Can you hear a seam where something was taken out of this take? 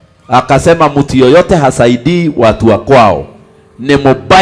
no; 0 cuts

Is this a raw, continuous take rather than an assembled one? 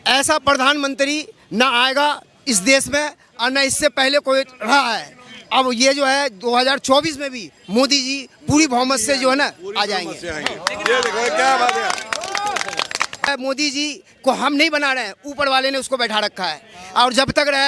no; 1 cut; at 13.3 s

